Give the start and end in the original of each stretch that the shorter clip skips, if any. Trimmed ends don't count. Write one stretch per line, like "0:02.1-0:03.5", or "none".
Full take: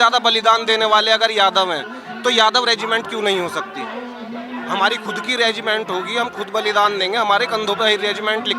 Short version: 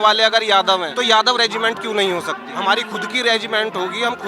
0:01.8-0:02.2
0:03.7-0:04.6